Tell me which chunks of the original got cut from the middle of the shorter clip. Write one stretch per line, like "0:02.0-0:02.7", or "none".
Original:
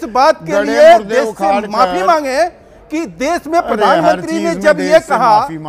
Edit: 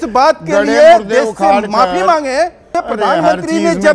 0:02.7-0:03.5

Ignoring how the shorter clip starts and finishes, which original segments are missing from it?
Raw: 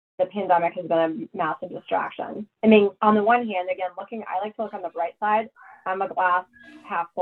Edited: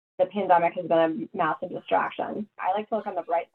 0:02.4-0:04.1

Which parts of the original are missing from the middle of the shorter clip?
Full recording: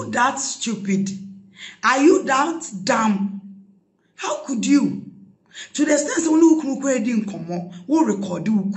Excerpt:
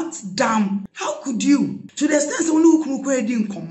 0:03.4-0:04.2
0:05.1-0:05.6

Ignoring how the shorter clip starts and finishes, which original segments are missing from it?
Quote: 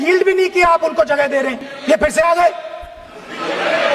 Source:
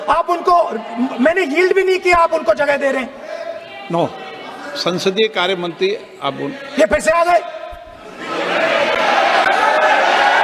0:03.2-0:06.6

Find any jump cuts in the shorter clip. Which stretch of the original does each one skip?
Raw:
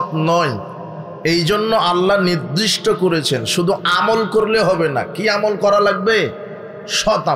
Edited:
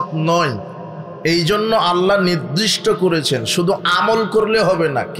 none

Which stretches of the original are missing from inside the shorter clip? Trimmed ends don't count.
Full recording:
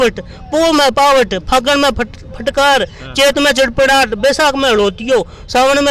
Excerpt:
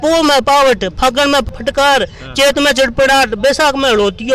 0:02.0-0:02.3

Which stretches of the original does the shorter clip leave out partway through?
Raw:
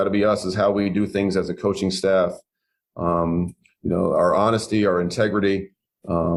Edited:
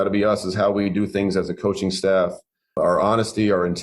0:02.8-0:04.1

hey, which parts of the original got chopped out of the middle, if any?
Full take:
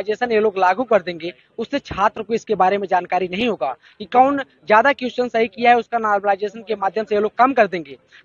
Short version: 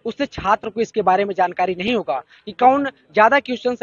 none

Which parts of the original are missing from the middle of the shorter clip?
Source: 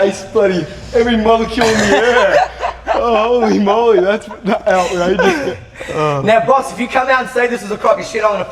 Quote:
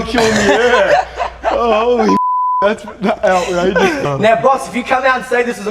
0:05.5-0:06.1

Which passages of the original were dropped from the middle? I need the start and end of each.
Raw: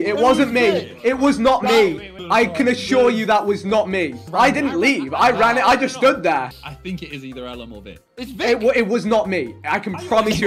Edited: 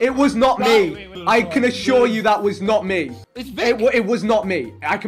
0:04.2-0:08.0

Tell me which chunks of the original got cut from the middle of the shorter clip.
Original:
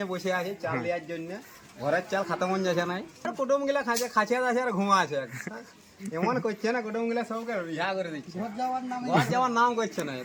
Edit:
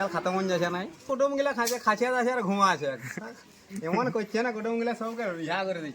0:03.1-0:03.3

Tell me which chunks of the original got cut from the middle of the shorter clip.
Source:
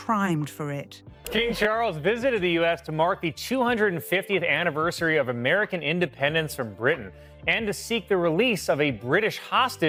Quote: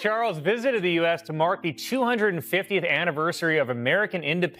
none

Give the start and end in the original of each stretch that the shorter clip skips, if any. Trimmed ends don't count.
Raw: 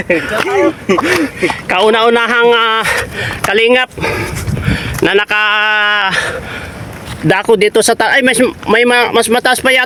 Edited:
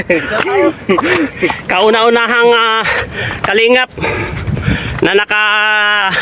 none

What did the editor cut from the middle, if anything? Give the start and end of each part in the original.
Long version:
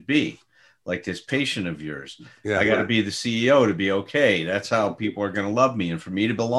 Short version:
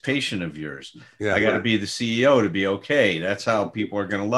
none

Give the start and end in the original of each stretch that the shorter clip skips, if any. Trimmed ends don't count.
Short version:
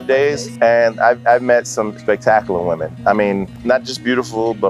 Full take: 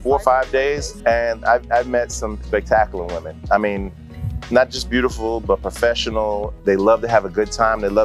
0:04.0-0:04.4

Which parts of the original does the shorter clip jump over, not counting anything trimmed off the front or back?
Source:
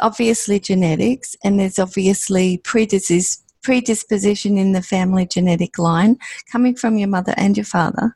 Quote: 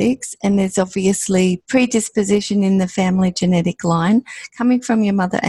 0:02.6-0:03.5

